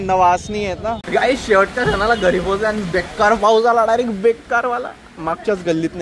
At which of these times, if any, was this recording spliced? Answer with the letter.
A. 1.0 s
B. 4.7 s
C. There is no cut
A